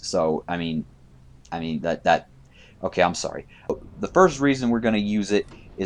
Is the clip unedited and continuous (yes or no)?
no